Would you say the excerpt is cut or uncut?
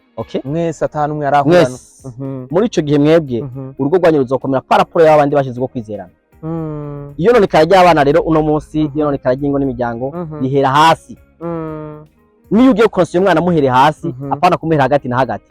uncut